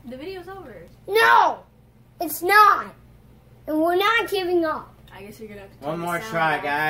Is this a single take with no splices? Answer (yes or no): yes